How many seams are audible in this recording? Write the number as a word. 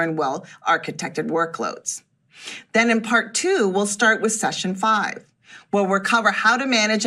zero